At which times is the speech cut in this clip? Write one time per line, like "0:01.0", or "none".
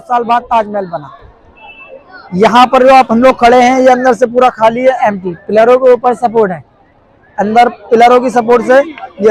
none